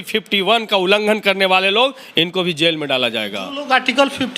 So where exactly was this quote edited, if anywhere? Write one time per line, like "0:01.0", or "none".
none